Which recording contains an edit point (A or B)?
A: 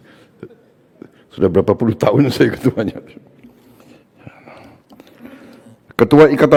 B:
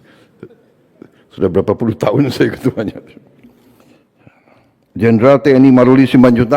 B